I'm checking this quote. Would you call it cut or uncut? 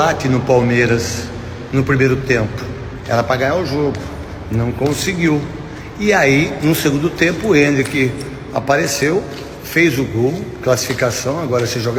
uncut